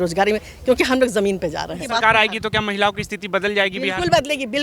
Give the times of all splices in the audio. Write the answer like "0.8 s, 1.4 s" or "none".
1.8 s